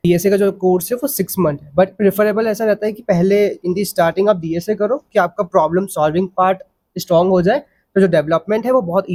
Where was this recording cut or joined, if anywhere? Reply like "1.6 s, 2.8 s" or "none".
none